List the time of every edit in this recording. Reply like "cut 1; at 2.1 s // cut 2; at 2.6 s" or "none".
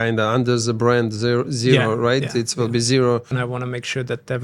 cut 1; at 3.4 s